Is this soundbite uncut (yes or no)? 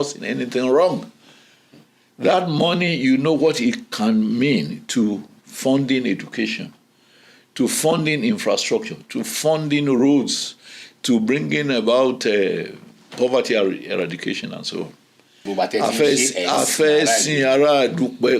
no